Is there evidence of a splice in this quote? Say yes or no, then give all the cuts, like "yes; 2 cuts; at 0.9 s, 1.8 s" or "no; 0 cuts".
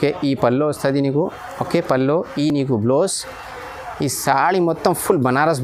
no; 0 cuts